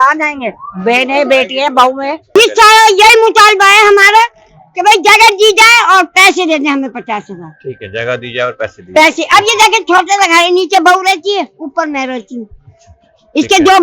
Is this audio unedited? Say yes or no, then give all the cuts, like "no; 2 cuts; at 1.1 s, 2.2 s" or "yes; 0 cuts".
no; 1 cut; at 2.4 s